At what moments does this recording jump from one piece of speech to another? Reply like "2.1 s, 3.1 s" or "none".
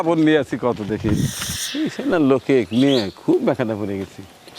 1.5 s